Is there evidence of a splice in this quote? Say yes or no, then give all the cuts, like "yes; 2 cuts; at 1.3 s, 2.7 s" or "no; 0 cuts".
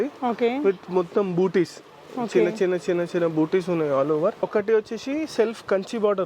yes; 1 cut; at 4.4 s